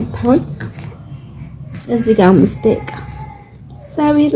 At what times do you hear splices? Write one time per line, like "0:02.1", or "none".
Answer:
none